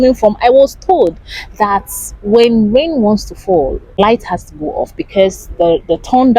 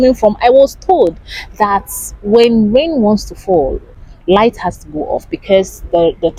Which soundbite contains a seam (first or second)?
first